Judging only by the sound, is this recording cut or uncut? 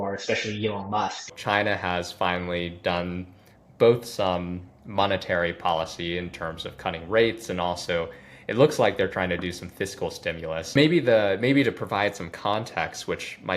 cut